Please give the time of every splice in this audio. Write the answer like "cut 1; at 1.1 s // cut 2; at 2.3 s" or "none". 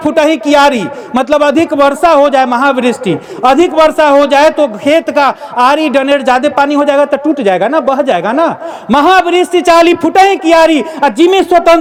none